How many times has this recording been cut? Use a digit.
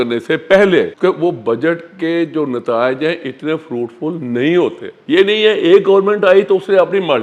2